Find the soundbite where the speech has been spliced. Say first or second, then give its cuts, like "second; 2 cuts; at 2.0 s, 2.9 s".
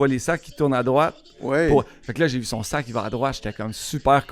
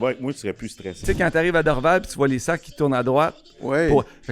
second; 1 cut; at 1.0 s